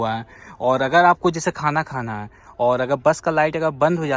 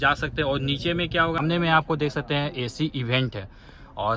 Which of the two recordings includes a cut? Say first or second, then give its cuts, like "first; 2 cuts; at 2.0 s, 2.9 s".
second; 1 cut; at 1.4 s